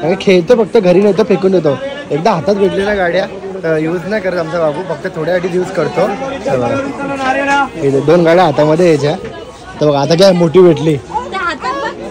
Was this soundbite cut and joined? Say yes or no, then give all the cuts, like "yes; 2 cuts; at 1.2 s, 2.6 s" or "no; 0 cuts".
no; 0 cuts